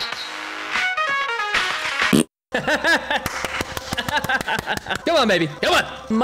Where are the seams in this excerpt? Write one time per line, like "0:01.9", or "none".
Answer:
none